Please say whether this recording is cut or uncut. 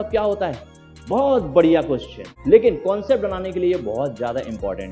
cut